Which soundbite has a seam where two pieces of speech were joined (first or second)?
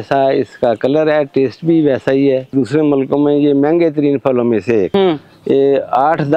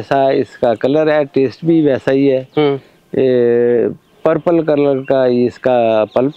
first